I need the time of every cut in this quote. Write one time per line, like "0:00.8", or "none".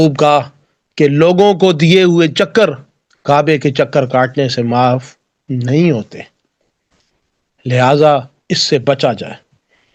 none